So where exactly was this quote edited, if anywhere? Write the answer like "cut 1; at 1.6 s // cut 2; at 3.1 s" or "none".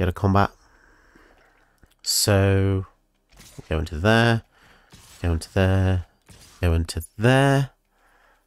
cut 1; at 1.4 s